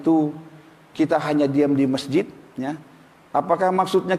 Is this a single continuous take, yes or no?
yes